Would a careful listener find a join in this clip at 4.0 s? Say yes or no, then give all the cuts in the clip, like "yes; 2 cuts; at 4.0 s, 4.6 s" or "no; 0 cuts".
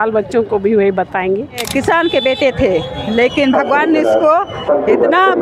no; 1 cut; at 1.6 s